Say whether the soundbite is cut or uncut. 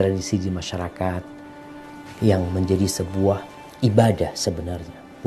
uncut